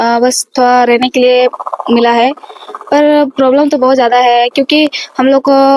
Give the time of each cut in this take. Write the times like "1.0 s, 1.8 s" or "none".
none